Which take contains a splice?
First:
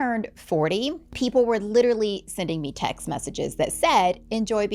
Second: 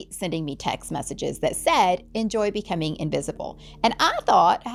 first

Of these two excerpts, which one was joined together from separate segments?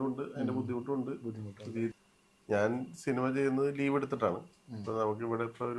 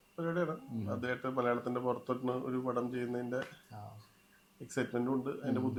first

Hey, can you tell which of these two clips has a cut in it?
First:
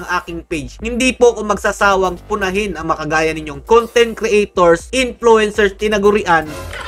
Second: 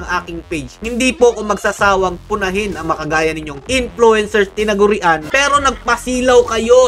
second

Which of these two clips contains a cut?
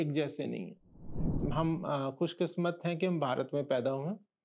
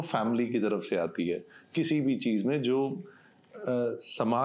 first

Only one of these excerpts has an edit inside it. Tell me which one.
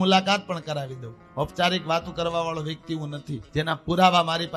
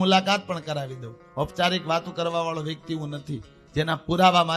first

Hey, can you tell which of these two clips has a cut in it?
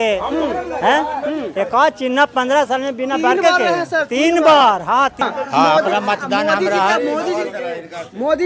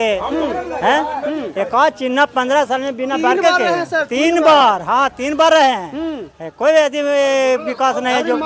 first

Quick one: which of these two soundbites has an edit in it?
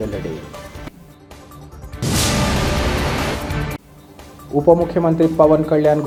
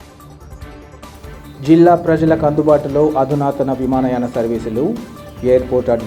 second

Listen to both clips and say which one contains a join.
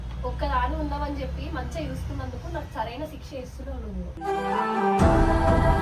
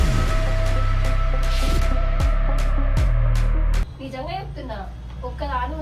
second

